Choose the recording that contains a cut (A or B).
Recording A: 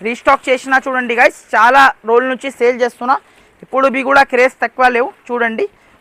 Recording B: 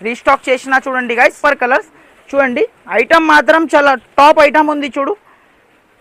B